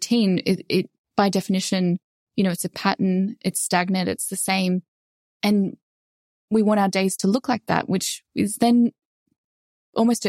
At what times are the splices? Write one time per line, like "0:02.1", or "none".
none